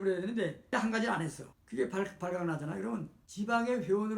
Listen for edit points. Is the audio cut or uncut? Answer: cut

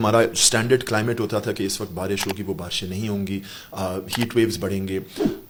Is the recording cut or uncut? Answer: uncut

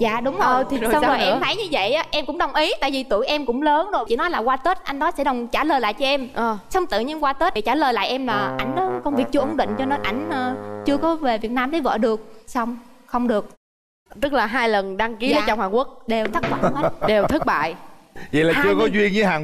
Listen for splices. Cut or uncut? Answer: uncut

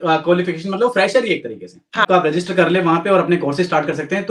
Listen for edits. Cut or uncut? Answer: cut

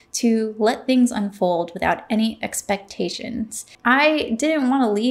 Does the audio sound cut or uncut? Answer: cut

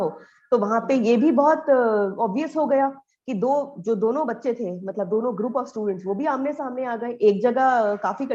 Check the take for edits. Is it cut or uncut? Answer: uncut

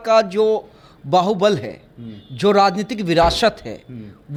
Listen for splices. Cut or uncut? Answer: uncut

